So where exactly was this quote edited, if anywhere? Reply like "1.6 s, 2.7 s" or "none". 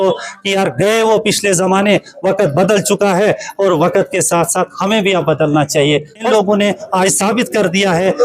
6.3 s